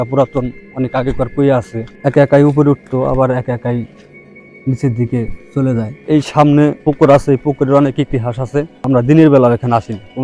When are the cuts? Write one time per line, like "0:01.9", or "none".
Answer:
0:01.8
0:06.0
0:06.8
0:08.8